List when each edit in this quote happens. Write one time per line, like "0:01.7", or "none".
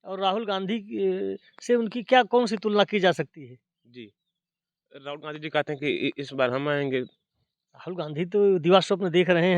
none